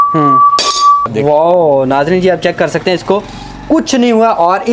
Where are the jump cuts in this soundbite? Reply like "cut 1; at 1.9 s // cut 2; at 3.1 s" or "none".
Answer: cut 1; at 1.0 s